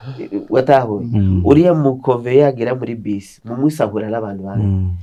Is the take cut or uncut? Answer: uncut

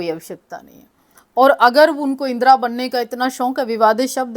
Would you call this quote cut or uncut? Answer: uncut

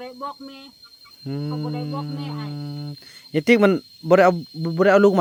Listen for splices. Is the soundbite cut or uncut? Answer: uncut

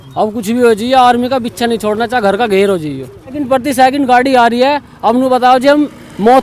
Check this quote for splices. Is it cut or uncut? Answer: cut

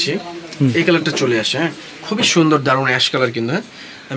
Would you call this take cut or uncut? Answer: uncut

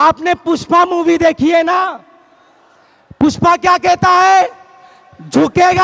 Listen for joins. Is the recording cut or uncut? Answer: uncut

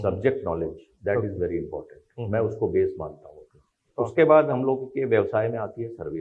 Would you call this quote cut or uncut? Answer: cut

